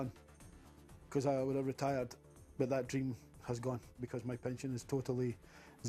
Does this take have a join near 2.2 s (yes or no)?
no